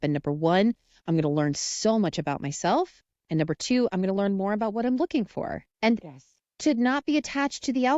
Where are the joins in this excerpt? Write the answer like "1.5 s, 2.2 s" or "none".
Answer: 5.6 s

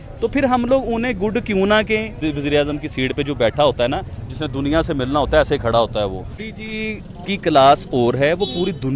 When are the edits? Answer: 2.2 s, 6.5 s

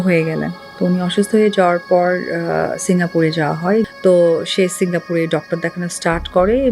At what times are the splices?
3.9 s

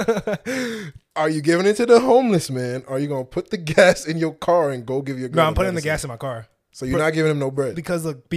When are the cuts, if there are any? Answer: none

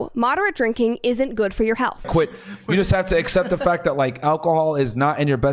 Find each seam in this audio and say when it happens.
2.1 s

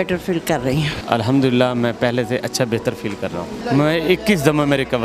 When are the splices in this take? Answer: 1.0 s, 3.6 s

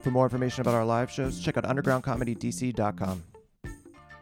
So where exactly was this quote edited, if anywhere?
3.3 s

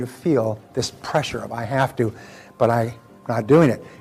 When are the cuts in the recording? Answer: none

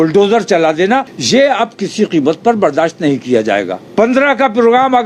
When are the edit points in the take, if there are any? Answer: 1.1 s, 3.8 s

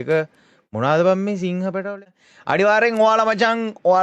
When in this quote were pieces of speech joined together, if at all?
2.0 s

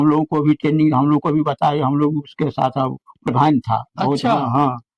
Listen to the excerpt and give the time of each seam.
3.3 s

